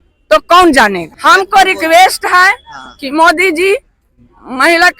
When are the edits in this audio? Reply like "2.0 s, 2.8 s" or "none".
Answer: 1.1 s